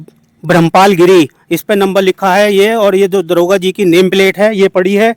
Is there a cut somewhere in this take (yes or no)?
no